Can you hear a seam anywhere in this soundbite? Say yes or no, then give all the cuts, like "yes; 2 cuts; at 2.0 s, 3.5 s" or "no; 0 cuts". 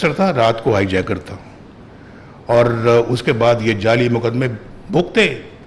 no; 0 cuts